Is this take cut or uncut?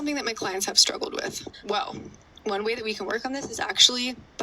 cut